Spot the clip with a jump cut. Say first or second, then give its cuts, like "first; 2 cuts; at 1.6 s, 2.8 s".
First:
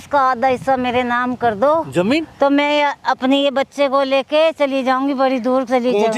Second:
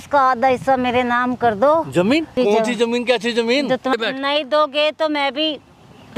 second; 2 cuts; at 2.4 s, 3.9 s